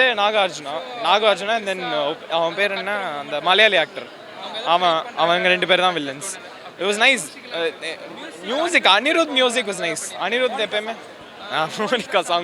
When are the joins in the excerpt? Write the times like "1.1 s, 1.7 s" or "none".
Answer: none